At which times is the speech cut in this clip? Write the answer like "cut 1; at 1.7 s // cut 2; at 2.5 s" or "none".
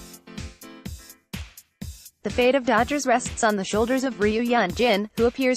none